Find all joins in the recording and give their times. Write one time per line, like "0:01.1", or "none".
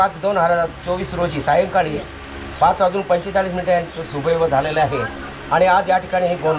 none

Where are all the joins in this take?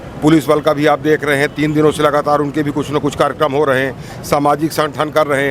none

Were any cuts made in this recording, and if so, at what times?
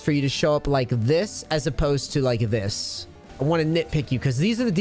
0:03.2

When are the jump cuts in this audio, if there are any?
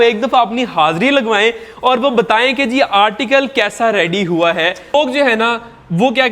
0:04.9

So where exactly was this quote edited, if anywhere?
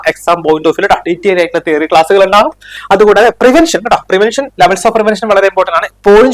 0:02.7

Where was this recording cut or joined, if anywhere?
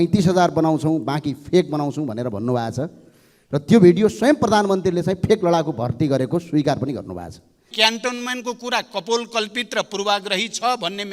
0:07.7

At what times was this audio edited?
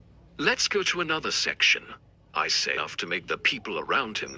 0:02.8

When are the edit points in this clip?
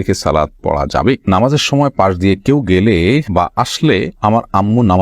0:01.3

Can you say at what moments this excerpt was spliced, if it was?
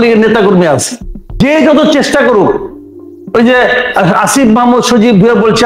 0:01.4

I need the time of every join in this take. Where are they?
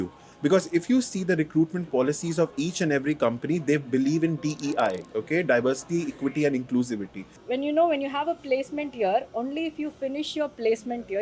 0:07.4

